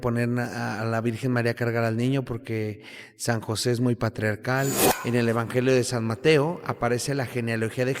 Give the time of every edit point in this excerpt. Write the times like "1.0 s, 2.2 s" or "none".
4.9 s